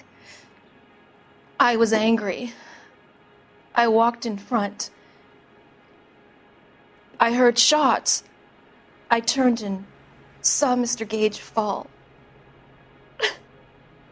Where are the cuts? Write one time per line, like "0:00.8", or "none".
none

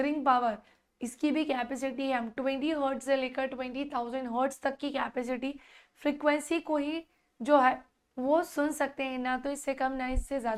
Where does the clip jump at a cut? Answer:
none

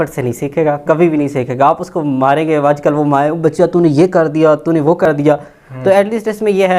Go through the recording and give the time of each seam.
none

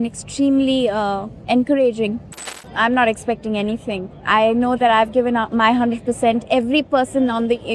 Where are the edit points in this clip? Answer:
0:01.3
0:02.4

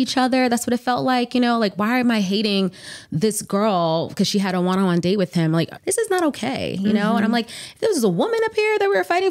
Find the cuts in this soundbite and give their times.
0:05.8

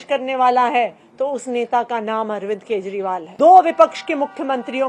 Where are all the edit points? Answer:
0:03.3

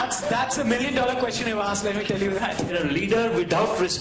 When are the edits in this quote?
0:02.7

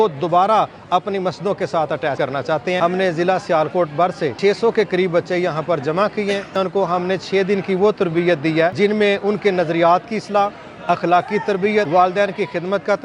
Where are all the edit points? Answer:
0:02.2
0:04.3
0:06.5
0:08.7
0:11.9

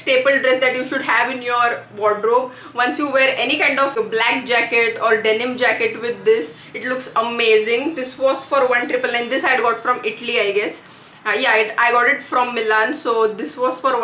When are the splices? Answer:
none

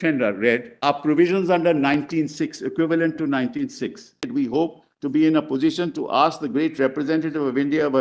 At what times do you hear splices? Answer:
0:04.3

